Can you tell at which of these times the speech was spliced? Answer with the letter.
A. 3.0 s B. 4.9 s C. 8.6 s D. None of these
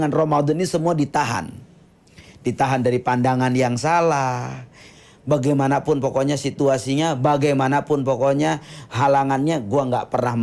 B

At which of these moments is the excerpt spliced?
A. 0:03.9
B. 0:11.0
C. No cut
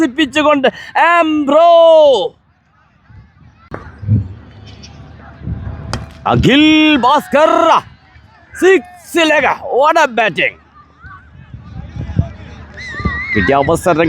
A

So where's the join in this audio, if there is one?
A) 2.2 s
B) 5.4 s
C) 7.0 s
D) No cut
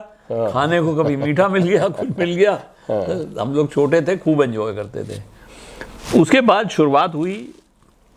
D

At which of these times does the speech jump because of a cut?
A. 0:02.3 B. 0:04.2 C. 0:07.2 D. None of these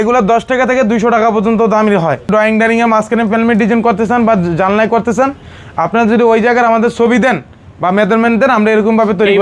A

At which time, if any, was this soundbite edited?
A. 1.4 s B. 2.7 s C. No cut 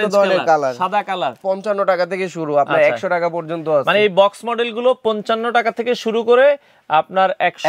A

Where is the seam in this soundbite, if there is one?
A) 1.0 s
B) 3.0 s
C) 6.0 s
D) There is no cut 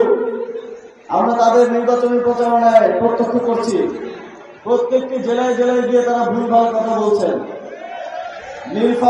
D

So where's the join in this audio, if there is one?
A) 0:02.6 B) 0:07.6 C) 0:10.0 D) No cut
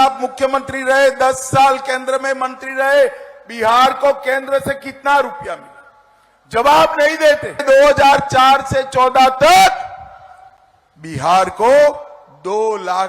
B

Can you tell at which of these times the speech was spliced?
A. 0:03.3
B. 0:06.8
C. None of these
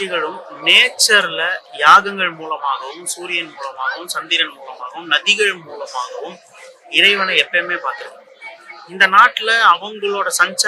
C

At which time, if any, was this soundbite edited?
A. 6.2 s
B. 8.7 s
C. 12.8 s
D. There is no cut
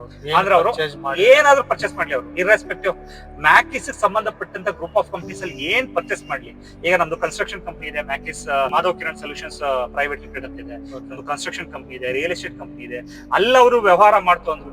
B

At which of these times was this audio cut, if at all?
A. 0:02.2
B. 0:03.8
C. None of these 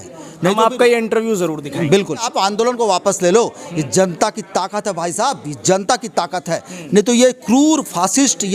A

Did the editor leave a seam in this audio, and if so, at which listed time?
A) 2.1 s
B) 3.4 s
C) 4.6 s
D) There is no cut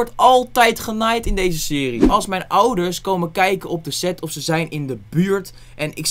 A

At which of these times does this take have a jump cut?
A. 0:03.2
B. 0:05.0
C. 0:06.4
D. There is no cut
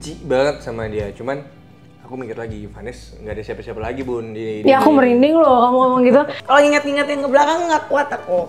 C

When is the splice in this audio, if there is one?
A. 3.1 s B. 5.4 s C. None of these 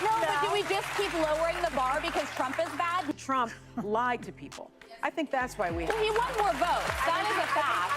A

